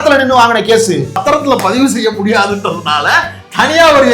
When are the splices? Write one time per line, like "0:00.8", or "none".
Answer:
0:01.2